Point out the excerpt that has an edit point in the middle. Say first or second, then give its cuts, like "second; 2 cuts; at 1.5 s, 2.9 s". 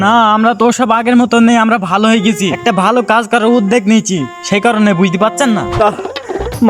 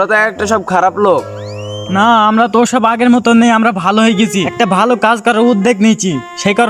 first; 1 cut; at 5.8 s